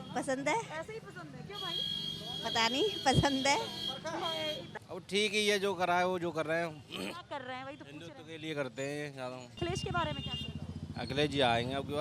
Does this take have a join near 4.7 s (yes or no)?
yes